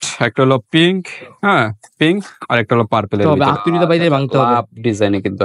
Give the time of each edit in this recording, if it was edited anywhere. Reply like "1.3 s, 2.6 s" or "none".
3.2 s